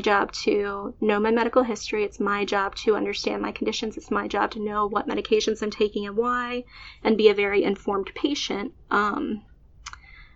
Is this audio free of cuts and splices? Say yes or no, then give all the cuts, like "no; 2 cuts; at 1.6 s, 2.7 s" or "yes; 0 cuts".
yes; 0 cuts